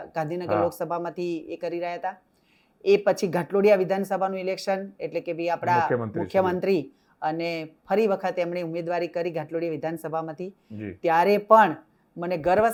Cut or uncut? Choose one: uncut